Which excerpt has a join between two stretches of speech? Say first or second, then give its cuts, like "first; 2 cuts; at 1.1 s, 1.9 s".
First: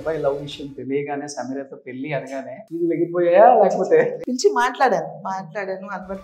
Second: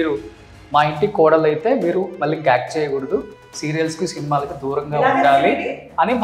first; 2 cuts; at 2.6 s, 4.2 s